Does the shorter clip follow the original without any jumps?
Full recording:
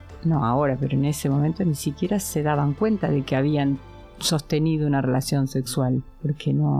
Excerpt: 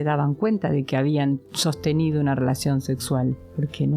no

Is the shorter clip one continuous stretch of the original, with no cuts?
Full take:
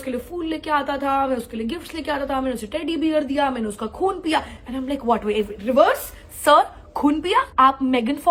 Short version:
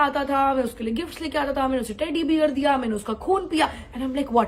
yes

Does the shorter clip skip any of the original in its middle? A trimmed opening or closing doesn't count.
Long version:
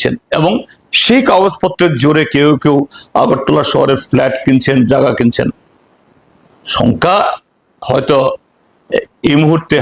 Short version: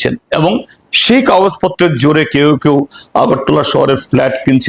no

